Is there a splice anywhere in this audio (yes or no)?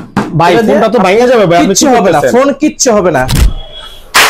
yes